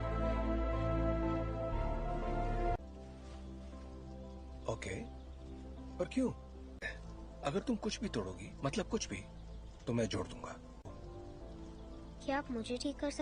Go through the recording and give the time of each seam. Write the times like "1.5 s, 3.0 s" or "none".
none